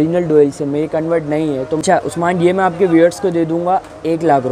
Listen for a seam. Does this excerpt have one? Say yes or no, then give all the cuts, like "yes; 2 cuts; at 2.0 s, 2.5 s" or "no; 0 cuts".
yes; 1 cut; at 1.8 s